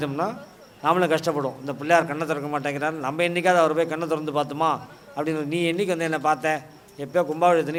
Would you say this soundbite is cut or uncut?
uncut